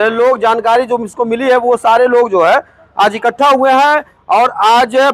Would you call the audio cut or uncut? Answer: uncut